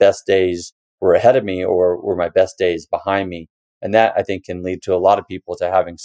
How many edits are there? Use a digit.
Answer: 0